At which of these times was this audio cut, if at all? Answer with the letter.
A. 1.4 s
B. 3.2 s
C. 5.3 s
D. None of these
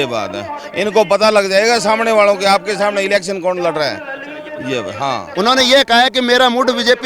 C